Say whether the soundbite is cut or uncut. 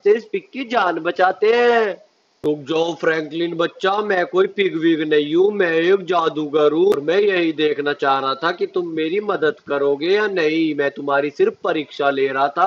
cut